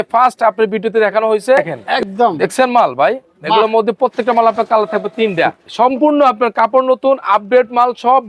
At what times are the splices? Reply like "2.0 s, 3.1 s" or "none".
1.8 s, 5.6 s